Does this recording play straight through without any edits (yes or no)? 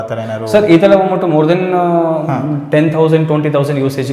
yes